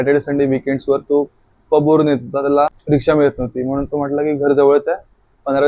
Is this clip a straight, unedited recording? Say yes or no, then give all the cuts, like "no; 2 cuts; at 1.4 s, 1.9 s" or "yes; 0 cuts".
no; 1 cut; at 2.8 s